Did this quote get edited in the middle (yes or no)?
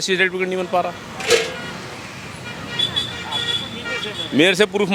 no